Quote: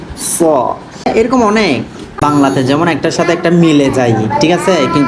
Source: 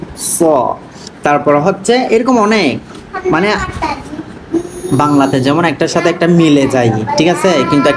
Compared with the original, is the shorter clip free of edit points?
no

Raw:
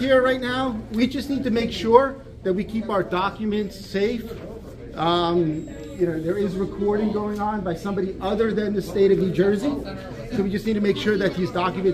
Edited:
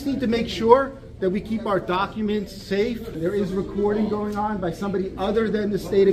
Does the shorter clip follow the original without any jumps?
no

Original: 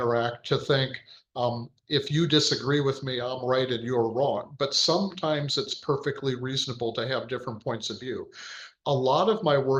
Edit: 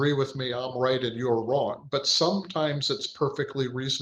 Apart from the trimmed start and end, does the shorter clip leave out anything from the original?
no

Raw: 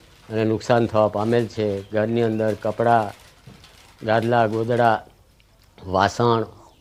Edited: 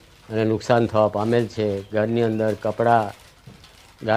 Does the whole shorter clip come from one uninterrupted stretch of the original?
yes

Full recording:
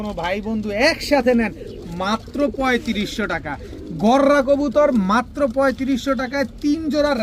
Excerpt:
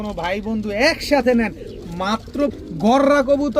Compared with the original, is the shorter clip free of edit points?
no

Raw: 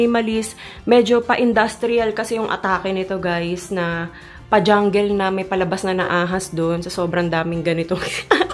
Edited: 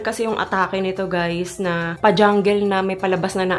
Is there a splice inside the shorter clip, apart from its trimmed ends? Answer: yes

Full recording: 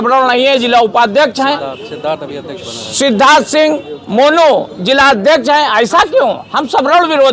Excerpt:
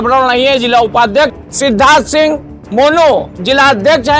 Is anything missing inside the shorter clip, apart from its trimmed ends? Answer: yes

